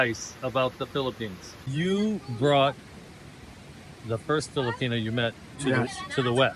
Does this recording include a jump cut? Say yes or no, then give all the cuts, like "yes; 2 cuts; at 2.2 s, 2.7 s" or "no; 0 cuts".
yes; 1 cut; at 1.6 s